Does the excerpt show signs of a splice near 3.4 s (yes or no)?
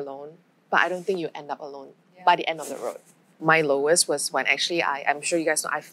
yes